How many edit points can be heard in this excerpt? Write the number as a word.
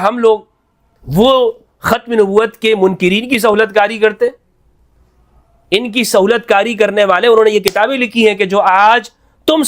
zero